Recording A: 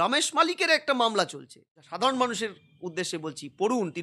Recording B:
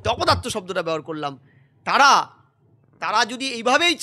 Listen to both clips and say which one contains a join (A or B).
A